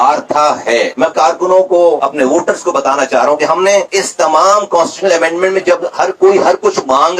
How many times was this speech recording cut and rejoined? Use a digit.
0